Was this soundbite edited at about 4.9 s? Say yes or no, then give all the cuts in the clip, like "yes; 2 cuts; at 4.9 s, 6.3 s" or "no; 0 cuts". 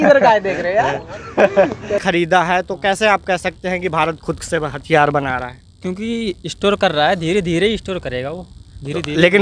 no; 1 cut; at 2.0 s